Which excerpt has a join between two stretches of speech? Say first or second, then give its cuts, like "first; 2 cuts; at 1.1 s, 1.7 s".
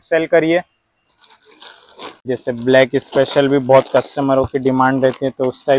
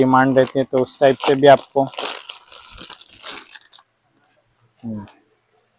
first; 1 cut; at 2.2 s